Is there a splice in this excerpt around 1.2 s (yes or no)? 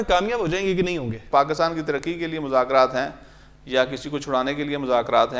yes